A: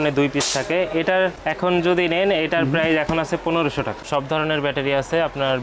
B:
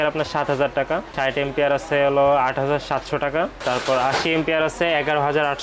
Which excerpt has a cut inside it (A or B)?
A